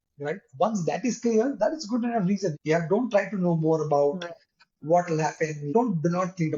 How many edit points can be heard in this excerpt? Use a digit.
2